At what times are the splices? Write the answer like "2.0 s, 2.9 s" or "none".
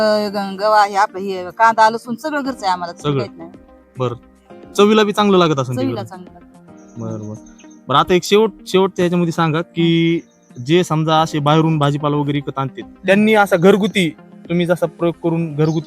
none